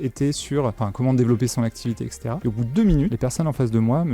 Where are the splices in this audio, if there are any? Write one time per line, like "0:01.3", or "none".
0:00.8
0:02.2
0:03.1